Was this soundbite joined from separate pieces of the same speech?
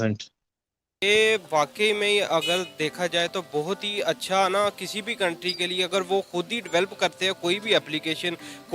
yes; 1 cut; at 1.0 s

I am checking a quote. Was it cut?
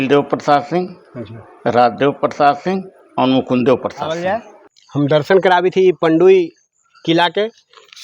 yes; 1 cut; at 4.2 s

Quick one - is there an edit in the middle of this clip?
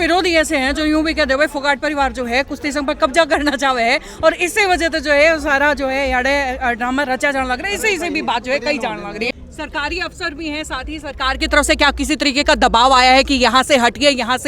yes; 1 cut; at 9.4 s

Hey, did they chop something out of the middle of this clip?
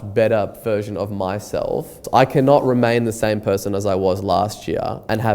yes; 1 cut; at 2.0 s

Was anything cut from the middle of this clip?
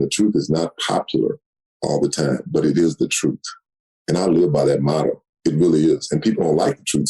no; 0 cuts

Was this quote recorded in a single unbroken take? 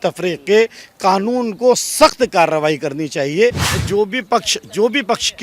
no; 1 cut; at 3.8 s

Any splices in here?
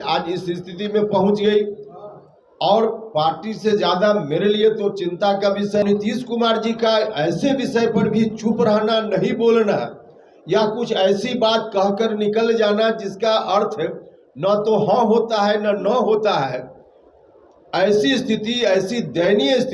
no; 0 cuts

